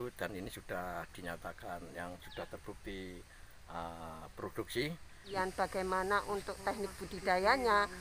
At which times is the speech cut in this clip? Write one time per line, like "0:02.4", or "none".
0:05.3